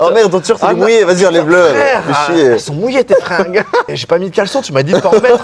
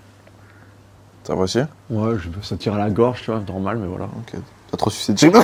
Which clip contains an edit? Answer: first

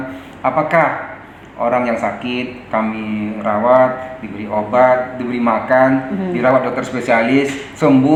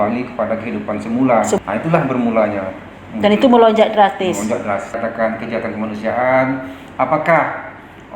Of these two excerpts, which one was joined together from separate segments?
second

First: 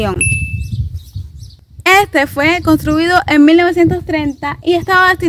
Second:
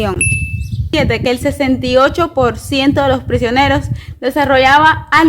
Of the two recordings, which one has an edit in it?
second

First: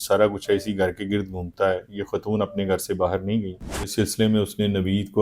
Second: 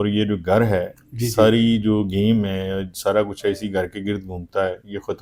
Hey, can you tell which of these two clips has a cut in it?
first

